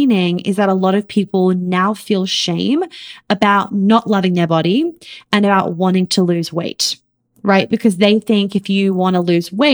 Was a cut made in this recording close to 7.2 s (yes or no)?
no